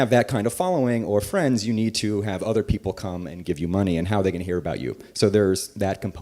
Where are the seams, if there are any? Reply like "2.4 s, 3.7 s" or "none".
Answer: 4.9 s